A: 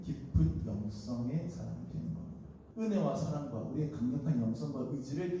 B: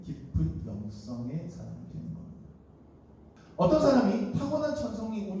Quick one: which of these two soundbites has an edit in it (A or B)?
A